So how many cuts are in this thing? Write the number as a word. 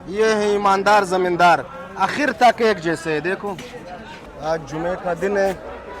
one